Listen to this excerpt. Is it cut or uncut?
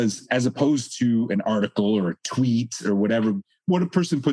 uncut